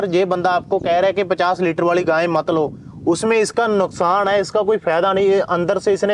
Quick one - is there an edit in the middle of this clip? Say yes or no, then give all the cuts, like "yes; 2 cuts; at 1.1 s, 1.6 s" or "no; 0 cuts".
no; 0 cuts